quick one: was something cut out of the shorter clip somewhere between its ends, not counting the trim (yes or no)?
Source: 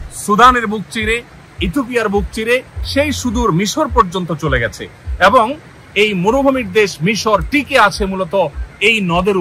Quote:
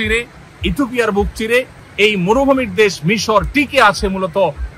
yes